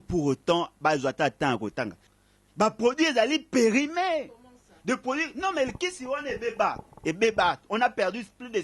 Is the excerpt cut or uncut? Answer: cut